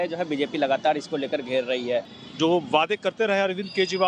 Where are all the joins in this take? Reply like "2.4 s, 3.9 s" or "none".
2.2 s